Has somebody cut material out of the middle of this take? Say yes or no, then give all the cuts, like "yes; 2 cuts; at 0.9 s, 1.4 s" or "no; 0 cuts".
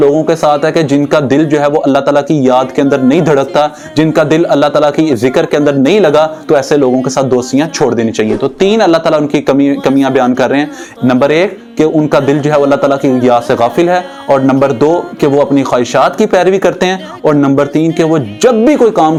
no; 0 cuts